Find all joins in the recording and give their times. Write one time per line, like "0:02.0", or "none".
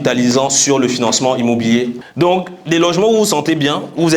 0:02.0

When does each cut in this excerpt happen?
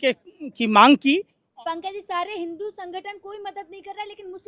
0:01.4

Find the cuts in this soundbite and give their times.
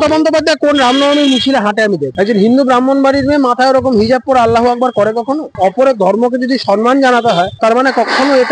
0:02.1
0:05.5

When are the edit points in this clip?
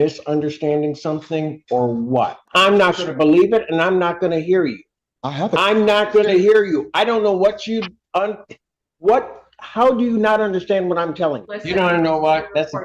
0:02.5
0:11.5

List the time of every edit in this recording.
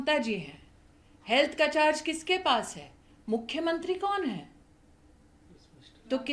none

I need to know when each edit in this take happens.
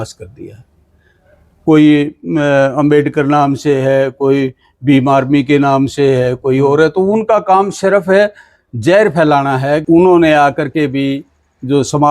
0:09.8

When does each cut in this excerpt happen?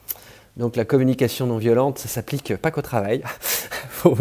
none

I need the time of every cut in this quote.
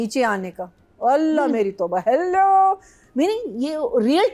none

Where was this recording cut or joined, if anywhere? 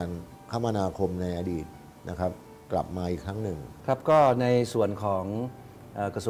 0:03.7

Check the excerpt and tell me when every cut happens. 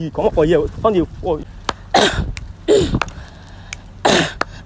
0:01.4

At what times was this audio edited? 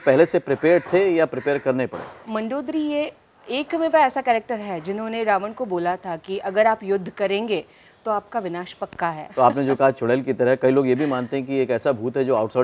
0:02.2
0:09.2

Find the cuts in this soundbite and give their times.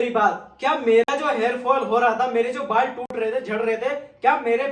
none

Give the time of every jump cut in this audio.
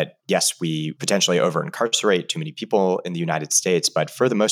0:00.9

